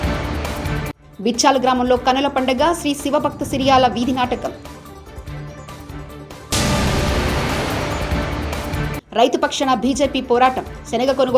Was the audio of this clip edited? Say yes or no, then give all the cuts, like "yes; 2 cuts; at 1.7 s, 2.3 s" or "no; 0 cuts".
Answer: yes; 1 cut; at 0.9 s